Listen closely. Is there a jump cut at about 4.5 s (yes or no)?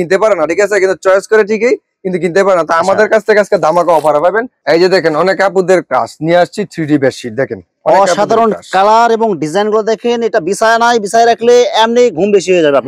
yes